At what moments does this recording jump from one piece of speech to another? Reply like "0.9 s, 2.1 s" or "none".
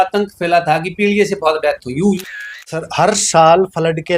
2.2 s